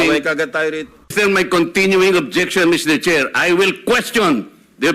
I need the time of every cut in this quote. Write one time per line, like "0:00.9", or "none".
0:00.9